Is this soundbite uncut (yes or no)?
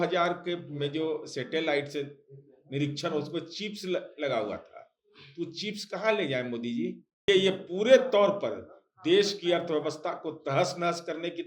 no